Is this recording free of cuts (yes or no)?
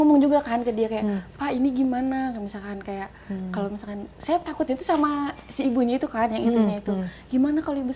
yes